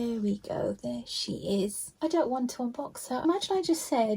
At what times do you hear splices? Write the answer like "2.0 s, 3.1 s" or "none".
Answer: 1.9 s, 3.2 s